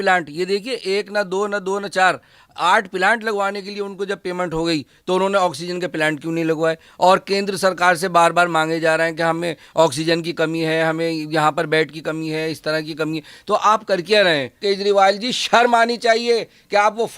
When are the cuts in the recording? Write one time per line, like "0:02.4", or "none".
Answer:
0:14.6